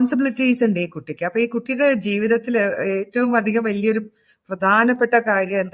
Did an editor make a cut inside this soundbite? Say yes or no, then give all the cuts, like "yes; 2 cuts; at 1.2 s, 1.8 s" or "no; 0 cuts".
no; 0 cuts